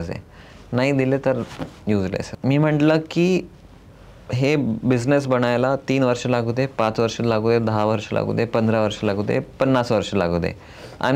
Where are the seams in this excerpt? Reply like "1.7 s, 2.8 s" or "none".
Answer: 2.3 s